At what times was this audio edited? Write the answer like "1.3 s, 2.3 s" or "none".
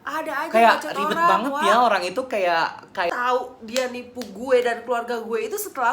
3.1 s